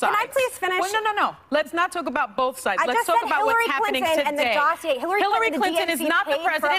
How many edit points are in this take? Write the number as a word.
one